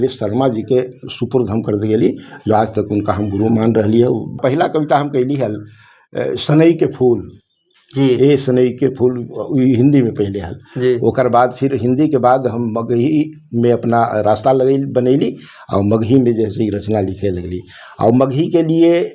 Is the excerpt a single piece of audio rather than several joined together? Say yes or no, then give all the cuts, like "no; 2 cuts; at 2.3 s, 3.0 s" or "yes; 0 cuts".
no; 1 cut; at 4.4 s